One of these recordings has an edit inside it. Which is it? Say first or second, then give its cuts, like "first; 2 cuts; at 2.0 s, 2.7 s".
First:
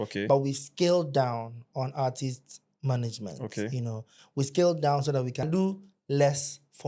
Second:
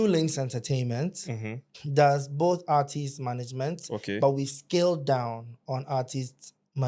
first; 1 cut; at 5.5 s